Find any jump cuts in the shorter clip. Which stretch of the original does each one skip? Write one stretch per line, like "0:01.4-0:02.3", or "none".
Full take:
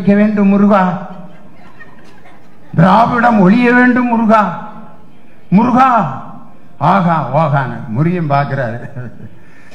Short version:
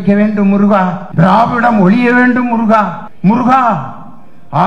0:01.0-0:02.6
0:04.6-0:05.3